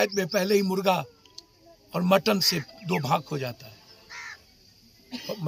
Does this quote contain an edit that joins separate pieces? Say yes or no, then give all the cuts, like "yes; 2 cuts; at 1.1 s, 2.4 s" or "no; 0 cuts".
no; 0 cuts